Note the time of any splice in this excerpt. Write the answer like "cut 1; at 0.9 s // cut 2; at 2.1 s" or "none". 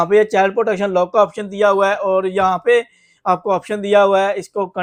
none